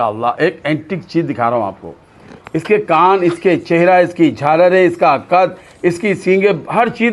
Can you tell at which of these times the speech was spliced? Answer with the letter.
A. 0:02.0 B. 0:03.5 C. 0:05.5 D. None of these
D